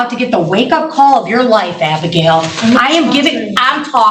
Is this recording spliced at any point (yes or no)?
no